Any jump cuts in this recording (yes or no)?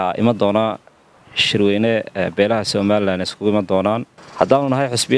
yes